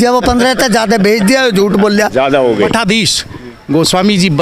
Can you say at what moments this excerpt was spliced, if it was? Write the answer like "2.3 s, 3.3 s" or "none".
2.7 s